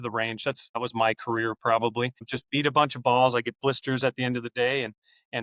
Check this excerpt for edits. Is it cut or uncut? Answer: cut